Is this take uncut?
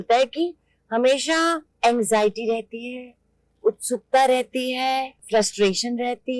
no; 2 cuts; at 1.7 s, 5.2 s

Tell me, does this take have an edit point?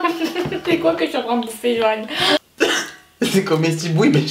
yes; 1 cut; at 2.4 s

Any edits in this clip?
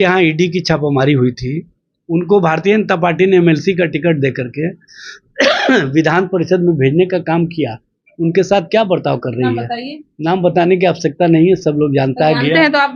no; 0 cuts

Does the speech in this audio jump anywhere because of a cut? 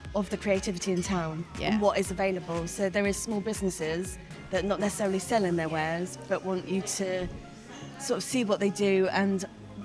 no; 0 cuts

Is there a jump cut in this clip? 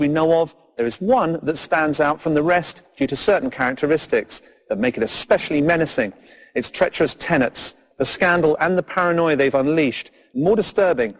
no; 0 cuts

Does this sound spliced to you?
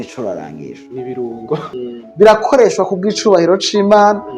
yes; 1 cut; at 1.6 s

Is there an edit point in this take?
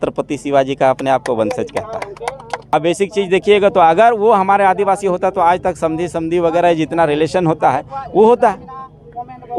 yes; 1 cut; at 2.7 s

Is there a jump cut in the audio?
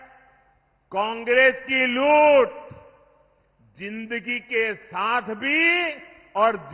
no; 0 cuts

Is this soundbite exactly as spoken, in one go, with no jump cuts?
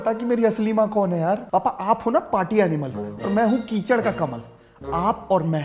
no; 1 cut; at 1.4 s

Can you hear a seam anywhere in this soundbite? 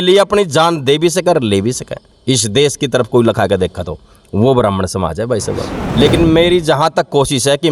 yes; 1 cut; at 5.8 s

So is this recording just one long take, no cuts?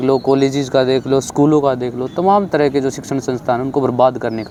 yes; 0 cuts

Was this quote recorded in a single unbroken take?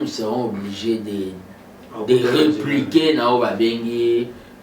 yes; 0 cuts

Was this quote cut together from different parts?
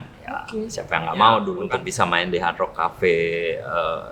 yes; 1 cut; at 1.6 s

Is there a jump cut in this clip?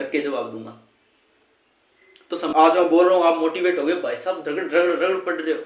yes; 1 cut; at 2.5 s

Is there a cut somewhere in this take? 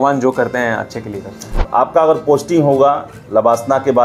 yes; 1 cut; at 1.4 s

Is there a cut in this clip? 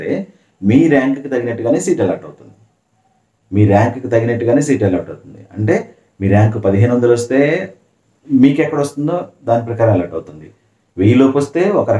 no; 0 cuts

